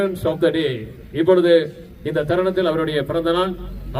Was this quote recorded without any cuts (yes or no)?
yes